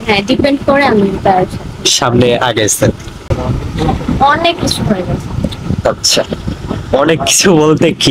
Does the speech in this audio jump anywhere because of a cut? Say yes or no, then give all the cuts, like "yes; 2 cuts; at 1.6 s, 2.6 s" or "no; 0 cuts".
yes; 1 cut; at 3.3 s